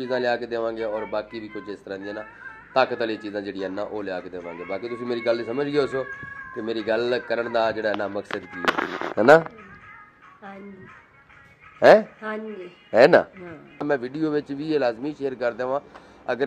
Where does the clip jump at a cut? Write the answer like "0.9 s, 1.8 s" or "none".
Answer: 13.8 s